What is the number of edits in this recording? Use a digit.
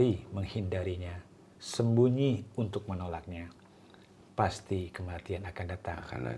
0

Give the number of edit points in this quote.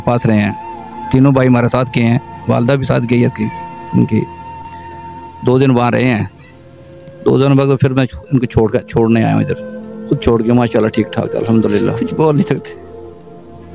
2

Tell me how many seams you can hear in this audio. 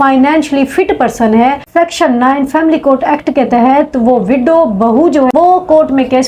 2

